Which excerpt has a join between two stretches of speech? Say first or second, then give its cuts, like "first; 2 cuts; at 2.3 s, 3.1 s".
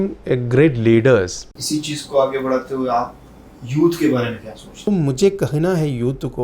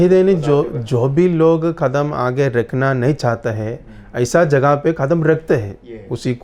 first; 2 cuts; at 1.5 s, 4.8 s